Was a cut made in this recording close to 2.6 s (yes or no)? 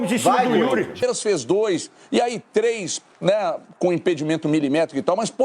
no